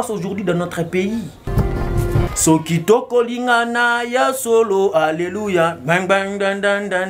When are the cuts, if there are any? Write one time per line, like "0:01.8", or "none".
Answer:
0:01.7

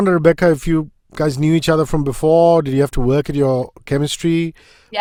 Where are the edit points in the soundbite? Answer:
none

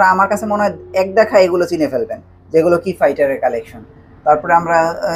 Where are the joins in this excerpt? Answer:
none

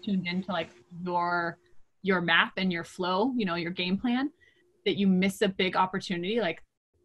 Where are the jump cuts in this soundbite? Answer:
none

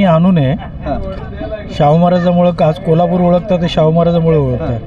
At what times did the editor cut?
none

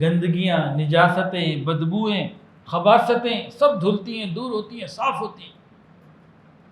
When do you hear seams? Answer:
none

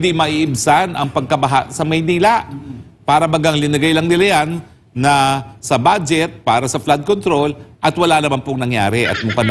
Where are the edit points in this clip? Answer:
0:07.0

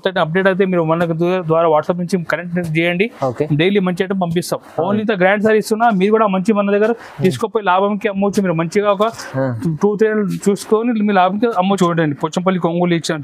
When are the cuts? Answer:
0:05.0
0:11.8

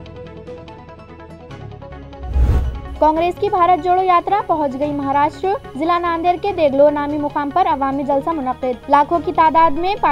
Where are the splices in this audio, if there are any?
0:02.7

